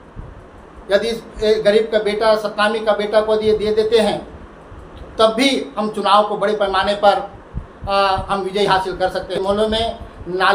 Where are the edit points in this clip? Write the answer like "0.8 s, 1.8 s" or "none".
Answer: 9.4 s